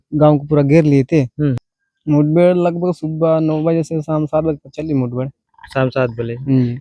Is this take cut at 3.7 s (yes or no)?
no